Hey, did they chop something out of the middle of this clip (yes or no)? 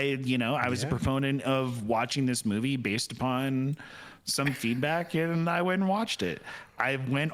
no